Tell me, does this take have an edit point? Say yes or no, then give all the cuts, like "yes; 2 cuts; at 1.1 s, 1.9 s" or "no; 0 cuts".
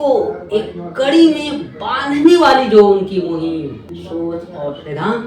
yes; 1 cut; at 3.9 s